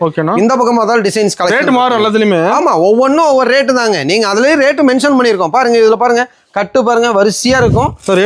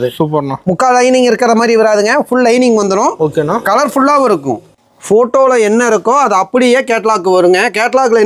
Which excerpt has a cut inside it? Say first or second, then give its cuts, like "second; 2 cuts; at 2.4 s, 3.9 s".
second; 1 cut; at 4.7 s